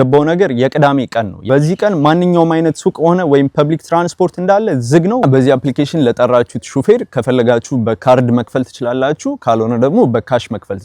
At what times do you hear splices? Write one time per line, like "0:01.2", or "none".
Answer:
0:01.4
0:05.2